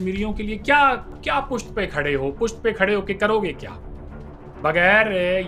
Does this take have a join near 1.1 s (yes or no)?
yes